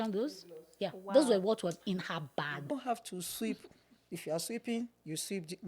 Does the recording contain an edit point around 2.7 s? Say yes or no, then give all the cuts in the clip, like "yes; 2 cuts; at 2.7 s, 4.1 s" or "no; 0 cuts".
yes; 1 cut; at 2.7 s